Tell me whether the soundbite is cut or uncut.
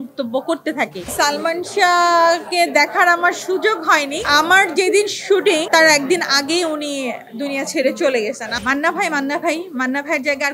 cut